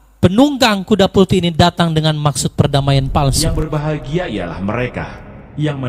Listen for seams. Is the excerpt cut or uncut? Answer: cut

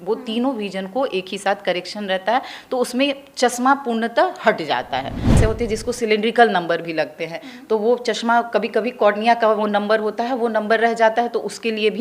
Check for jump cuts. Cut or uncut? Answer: cut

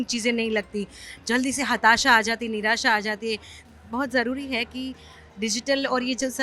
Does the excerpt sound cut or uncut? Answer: cut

